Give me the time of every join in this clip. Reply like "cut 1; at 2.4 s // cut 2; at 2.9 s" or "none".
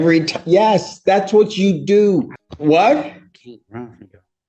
cut 1; at 2.4 s